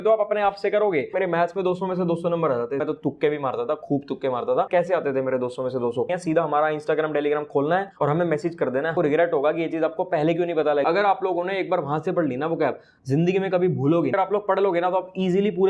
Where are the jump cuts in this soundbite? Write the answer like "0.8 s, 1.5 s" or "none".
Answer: 1.1 s, 2.8 s, 4.7 s, 6.1 s, 8.9 s, 10.8 s, 14.1 s